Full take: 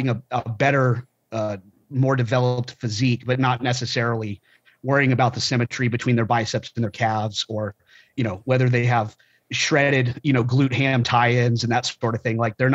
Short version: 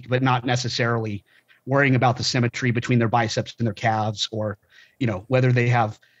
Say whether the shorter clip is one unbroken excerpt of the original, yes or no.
yes